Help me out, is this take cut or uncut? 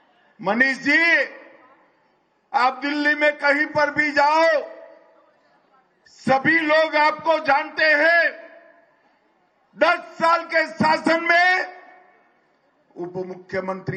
uncut